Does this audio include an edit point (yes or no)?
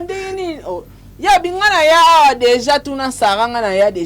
no